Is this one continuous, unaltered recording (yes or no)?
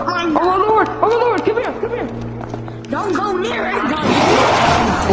yes